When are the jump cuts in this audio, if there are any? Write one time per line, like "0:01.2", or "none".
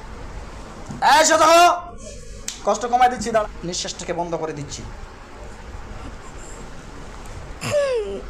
0:03.4